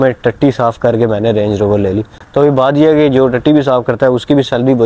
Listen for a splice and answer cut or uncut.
uncut